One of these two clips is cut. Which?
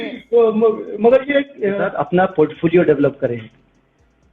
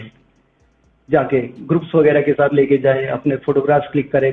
first; 1 cut; at 1.9 s

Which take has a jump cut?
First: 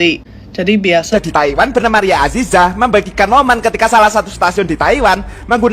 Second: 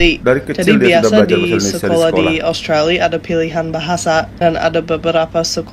first; 1 cut; at 1.1 s

